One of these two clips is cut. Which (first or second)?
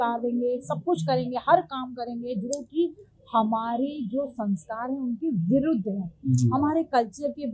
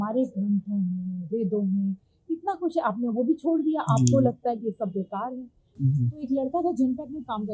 second